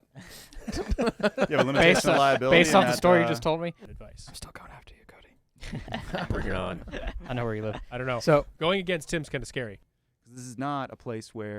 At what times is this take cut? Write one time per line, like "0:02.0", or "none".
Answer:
0:03.9
0:09.8